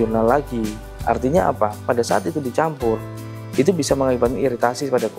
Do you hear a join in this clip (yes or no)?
no